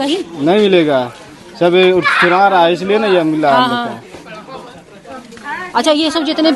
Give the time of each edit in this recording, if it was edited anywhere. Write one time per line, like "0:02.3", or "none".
none